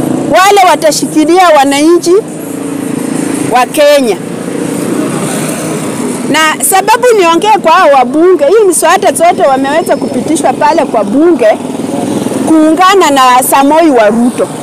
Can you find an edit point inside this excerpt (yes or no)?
no